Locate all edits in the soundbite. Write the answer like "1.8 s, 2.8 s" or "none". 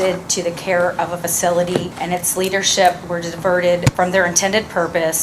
1.9 s, 3.9 s

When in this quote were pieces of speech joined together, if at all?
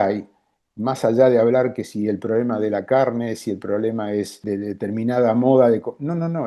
4.4 s

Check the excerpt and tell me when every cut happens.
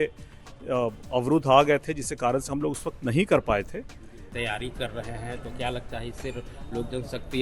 4.2 s

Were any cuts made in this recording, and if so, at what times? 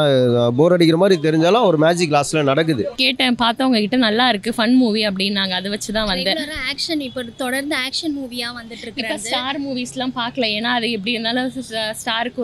3.0 s

